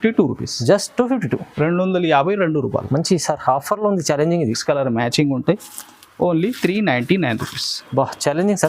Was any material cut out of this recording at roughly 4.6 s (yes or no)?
yes